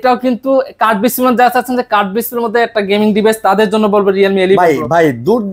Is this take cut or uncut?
uncut